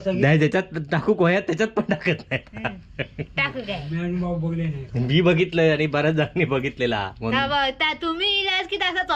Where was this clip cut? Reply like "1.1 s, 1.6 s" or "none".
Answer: none